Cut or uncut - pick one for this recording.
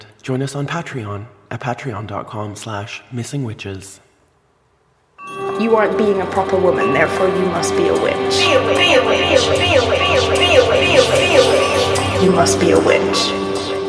cut